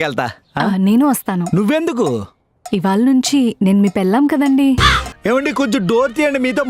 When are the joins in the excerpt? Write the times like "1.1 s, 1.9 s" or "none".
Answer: 5.1 s